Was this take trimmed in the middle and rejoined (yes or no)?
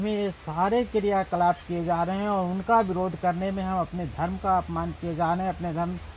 no